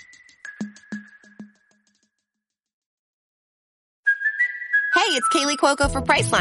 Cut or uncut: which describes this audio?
uncut